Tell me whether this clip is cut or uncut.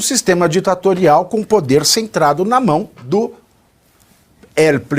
cut